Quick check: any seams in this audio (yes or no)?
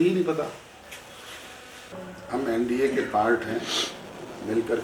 yes